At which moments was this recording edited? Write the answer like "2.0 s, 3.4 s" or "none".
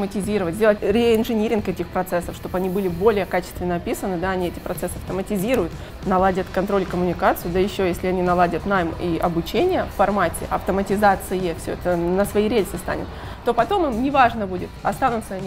0.8 s, 5.9 s